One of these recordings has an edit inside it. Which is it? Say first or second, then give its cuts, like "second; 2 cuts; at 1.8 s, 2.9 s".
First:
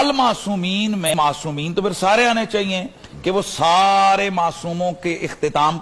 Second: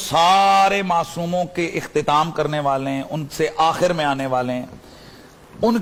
first; 1 cut; at 1.1 s